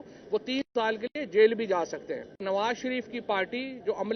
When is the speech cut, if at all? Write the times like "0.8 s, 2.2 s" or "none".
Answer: 2.4 s